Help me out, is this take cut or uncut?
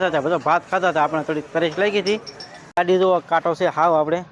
cut